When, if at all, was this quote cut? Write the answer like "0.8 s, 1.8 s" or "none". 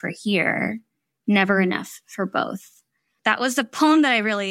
3.2 s

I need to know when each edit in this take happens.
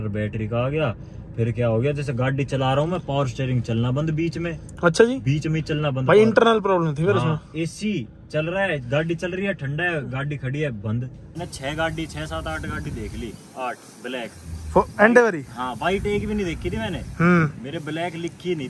11.2 s

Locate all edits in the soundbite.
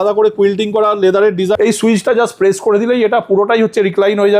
1.6 s

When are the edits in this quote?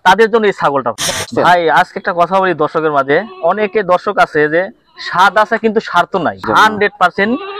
1.3 s, 6.4 s

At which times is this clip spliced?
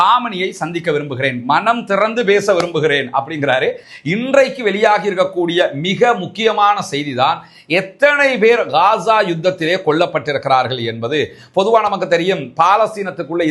3.9 s

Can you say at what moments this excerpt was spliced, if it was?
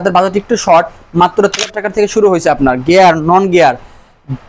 1.5 s

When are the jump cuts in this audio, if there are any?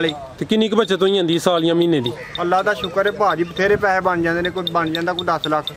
none

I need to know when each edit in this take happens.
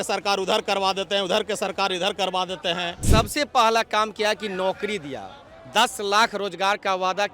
3.0 s

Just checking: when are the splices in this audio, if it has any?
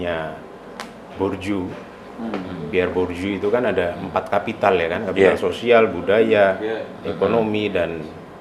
none

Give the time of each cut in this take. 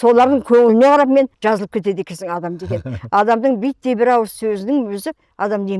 1.3 s

